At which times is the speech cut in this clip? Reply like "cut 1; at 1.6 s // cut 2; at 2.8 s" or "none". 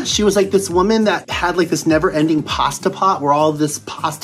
cut 1; at 1.3 s